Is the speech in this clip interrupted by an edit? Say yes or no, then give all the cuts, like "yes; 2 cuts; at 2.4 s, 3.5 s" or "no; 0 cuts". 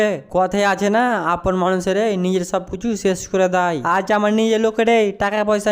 no; 0 cuts